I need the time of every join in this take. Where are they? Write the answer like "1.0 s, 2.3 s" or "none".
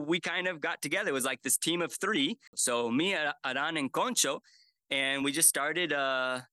2.5 s